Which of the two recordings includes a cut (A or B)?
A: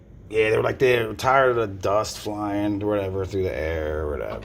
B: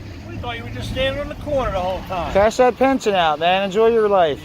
B